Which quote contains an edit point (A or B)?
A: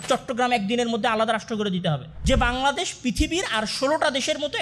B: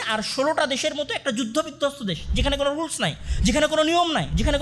A